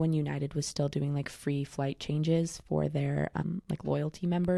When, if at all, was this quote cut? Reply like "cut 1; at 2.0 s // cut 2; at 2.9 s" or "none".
none